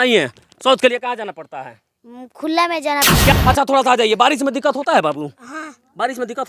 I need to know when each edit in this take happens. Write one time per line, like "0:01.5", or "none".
0:03.3